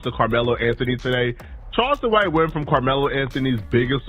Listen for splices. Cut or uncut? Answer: uncut